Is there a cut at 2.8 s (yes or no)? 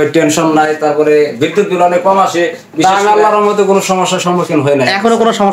yes